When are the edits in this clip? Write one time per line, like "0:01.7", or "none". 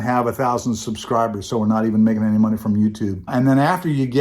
0:03.3